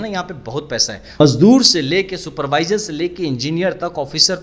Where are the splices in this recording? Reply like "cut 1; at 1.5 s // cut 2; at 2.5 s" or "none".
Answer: cut 1; at 1.0 s